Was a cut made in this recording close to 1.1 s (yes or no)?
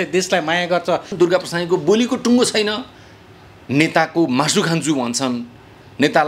yes